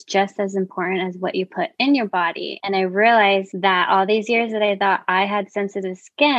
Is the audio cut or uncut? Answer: cut